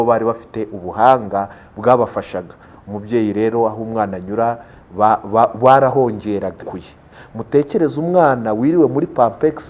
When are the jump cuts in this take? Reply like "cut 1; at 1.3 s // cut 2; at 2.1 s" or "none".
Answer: cut 1; at 6.7 s